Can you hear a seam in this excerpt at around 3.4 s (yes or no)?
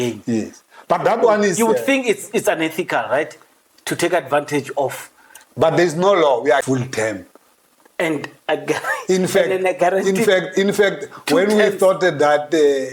no